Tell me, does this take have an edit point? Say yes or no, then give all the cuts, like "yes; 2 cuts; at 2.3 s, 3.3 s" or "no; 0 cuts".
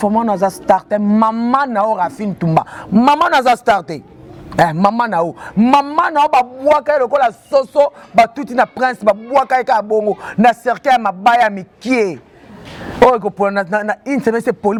no; 0 cuts